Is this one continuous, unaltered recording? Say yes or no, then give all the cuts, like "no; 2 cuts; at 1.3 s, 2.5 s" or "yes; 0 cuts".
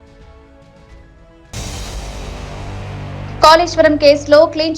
yes; 0 cuts